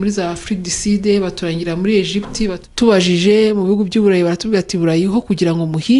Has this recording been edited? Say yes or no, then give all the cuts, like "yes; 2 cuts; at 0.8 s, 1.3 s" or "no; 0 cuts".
yes; 1 cut; at 2.6 s